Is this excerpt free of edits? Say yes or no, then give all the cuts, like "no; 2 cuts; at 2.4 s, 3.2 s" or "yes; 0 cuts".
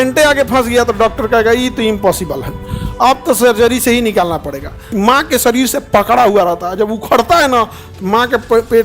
no; 1 cut; at 4.9 s